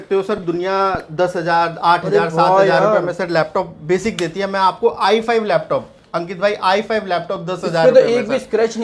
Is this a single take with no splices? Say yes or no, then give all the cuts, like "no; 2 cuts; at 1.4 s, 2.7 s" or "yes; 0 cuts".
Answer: yes; 0 cuts